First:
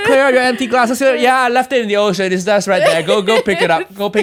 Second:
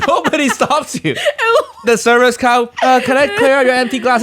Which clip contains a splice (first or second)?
second